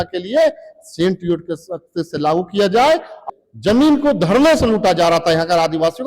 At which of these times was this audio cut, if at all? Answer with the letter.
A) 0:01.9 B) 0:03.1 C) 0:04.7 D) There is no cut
B